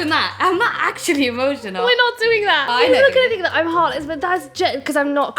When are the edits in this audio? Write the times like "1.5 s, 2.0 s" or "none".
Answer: 2.6 s